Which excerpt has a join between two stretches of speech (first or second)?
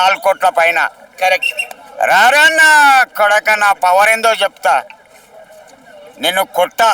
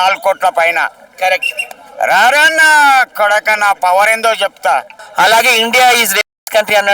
second